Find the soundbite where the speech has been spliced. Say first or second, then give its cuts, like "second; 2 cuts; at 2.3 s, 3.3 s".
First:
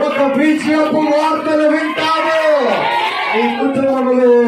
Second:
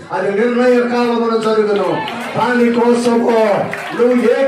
first; 1 cut; at 3.1 s